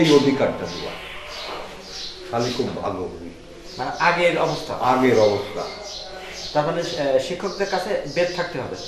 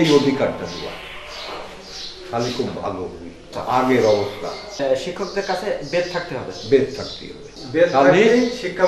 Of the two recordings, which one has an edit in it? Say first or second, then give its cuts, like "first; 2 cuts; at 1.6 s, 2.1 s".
second; 3 cuts; at 3.5 s, 4.8 s, 7.5 s